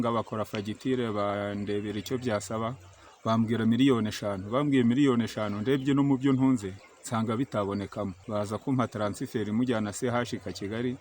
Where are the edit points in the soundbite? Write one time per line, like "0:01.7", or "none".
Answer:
0:08.2